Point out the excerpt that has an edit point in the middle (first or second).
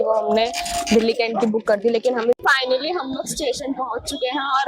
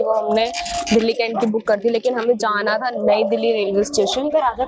first